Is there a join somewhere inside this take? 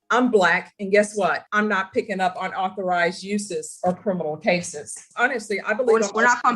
yes; 2 cuts; at 1.5 s, 5.1 s

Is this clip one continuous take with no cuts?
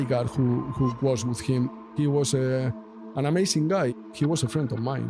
no; 2 cuts; at 1.7 s, 4.0 s

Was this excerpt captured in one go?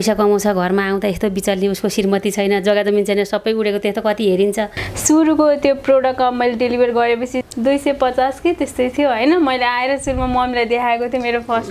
no; 2 cuts; at 4.9 s, 7.4 s

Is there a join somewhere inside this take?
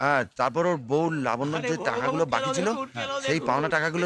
no; 0 cuts

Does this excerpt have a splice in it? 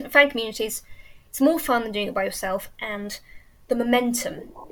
no; 0 cuts

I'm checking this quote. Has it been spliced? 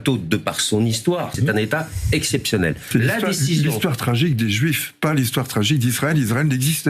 yes; 2 cuts; at 1.4 s, 2.8 s

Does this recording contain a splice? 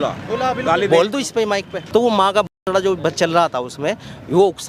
yes; 1 cut; at 1.7 s

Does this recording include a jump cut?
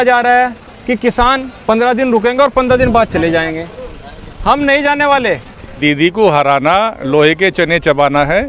yes; 1 cut; at 5.7 s

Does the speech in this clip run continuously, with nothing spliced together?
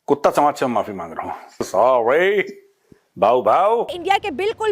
no; 2 cuts; at 1.7 s, 3.9 s

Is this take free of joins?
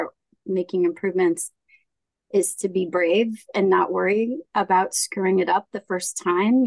yes; 0 cuts

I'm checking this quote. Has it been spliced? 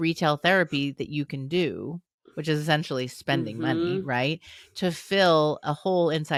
no; 0 cuts

